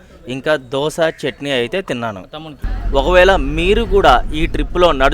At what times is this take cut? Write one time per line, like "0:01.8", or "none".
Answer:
0:02.7